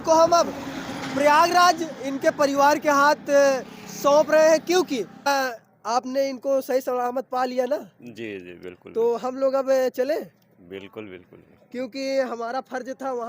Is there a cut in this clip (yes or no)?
yes